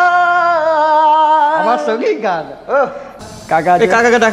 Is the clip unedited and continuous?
no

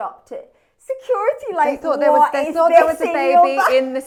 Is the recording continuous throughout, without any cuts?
yes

